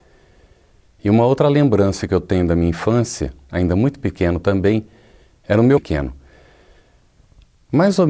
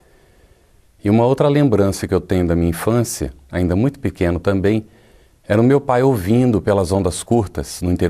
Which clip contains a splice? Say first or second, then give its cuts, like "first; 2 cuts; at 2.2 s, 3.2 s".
second; 1 cut; at 5.8 s